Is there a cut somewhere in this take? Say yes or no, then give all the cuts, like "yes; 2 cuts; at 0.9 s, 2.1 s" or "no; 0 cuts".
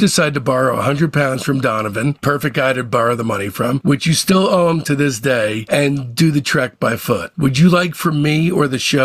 yes; 1 cut; at 7.3 s